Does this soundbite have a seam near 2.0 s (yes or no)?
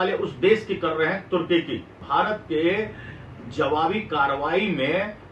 yes